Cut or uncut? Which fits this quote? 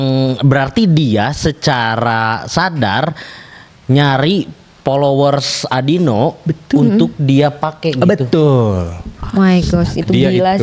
uncut